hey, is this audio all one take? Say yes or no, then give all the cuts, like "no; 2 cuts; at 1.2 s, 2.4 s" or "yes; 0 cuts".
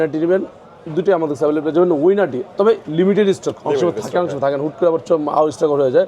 yes; 0 cuts